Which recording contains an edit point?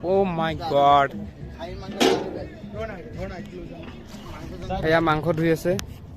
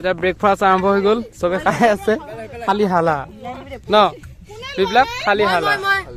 first; 1 cut; at 4.8 s

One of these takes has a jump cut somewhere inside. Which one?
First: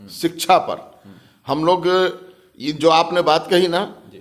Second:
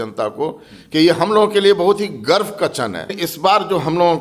second; 1 cut; at 3.2 s

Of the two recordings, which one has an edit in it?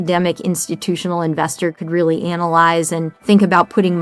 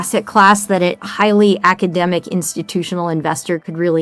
first; 1 cut; at 3.1 s

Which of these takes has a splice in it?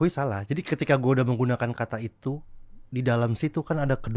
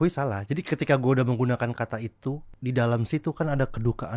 second; 1 cut; at 2.5 s

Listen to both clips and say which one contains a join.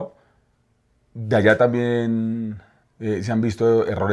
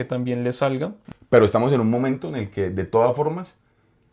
second; 1 cut; at 1.0 s

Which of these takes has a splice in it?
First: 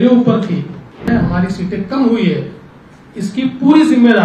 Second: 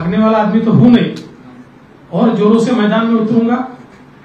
first; 1 cut; at 1.1 s

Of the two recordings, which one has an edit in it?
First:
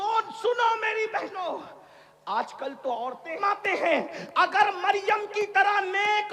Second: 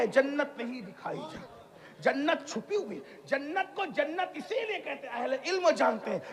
first; 1 cut; at 3.4 s

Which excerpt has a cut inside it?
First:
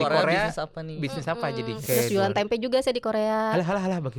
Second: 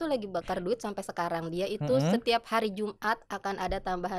first; 1 cut; at 1.8 s

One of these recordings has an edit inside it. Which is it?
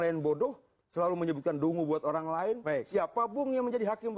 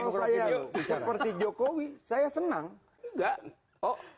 second; 1 cut; at 2.9 s

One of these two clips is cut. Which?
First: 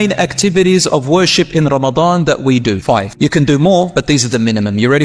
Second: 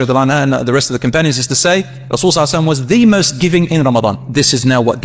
first; 1 cut; at 3.1 s

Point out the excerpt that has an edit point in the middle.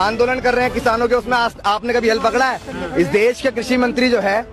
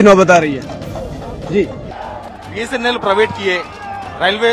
second; 1 cut; at 1.9 s

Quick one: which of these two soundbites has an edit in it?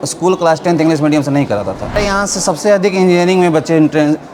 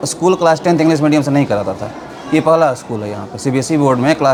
first; 1 cut; at 2.0 s

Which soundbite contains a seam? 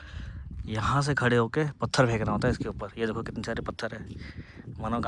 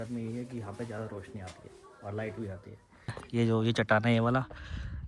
second; 1 cut; at 3.2 s

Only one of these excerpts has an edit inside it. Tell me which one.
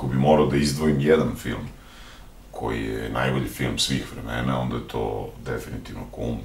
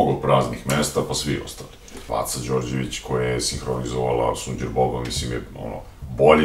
second; 1 cut; at 2.0 s

